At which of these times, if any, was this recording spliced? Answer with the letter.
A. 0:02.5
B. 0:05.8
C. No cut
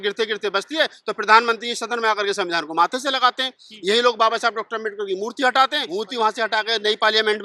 B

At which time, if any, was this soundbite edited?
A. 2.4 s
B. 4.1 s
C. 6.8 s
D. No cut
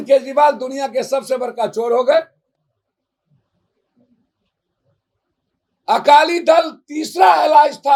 D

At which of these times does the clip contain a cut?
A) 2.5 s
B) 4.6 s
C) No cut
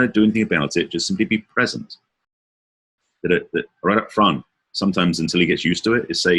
A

